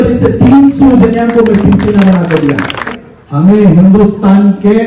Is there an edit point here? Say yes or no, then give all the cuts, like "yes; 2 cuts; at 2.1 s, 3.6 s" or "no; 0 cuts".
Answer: yes; 1 cut; at 2.9 s